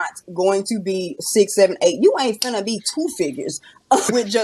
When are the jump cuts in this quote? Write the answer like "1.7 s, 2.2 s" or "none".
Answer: none